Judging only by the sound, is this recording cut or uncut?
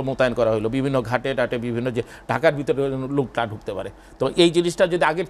uncut